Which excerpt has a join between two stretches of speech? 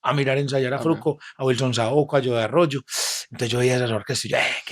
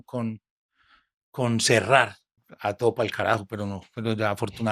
second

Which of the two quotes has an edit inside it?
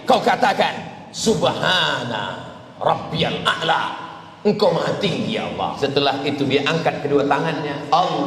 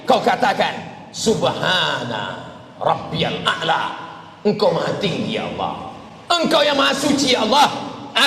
first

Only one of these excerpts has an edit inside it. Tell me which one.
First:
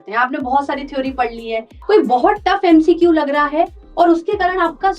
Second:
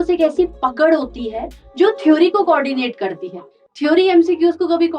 first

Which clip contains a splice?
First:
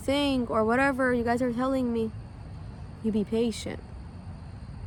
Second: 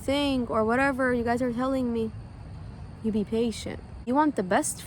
second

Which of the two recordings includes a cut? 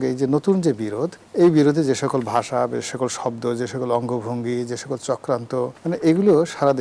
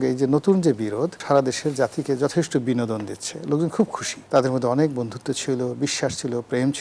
second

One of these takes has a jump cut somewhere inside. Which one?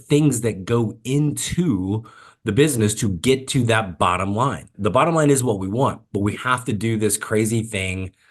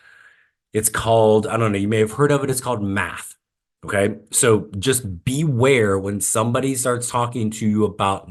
first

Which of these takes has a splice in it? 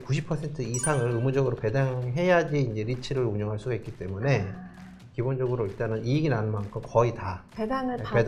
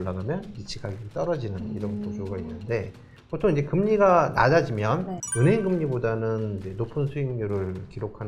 second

